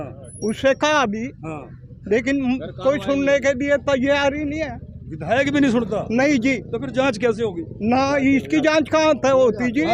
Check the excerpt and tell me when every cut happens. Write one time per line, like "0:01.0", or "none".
none

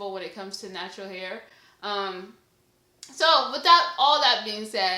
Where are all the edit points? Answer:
none

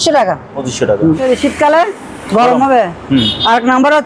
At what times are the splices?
0:01.2

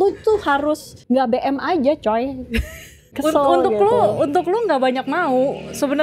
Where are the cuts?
0:00.9
0:03.1

